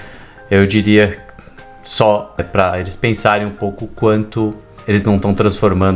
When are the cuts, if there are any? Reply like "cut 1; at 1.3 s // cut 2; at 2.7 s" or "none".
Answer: cut 1; at 2.4 s // cut 2; at 4.7 s